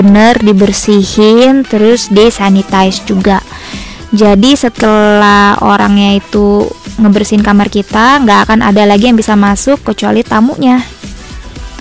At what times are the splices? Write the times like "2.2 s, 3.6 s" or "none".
10.9 s